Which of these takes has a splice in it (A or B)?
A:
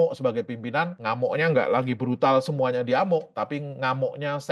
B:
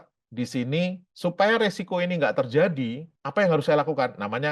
A